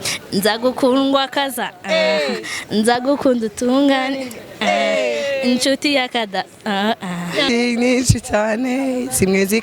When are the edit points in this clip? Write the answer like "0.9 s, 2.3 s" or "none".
7.5 s